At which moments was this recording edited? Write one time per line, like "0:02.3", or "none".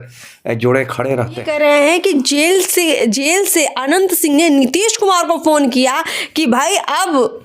0:01.4